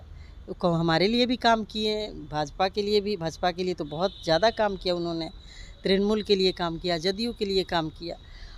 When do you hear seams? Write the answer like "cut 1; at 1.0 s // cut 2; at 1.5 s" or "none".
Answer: none